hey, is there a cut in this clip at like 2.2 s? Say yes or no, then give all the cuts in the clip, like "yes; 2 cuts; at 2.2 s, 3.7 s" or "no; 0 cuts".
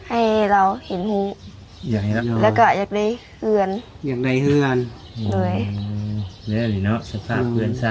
yes; 1 cut; at 2.2 s